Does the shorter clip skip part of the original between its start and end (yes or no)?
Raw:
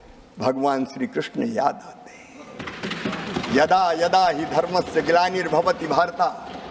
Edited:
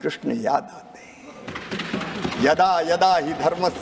no